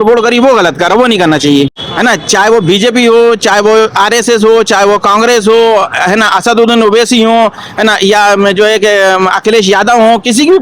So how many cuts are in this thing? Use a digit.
1